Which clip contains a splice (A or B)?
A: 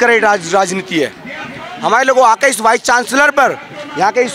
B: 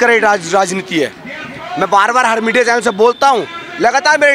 A